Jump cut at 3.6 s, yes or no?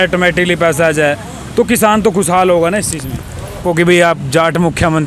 yes